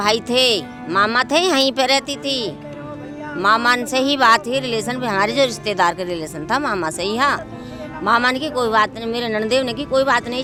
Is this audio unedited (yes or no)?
yes